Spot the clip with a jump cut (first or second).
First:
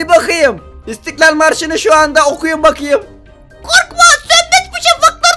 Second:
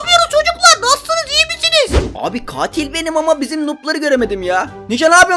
second